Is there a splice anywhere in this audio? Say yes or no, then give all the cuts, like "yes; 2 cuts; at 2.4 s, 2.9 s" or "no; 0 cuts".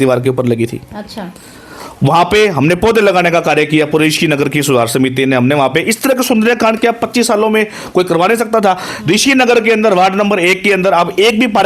no; 0 cuts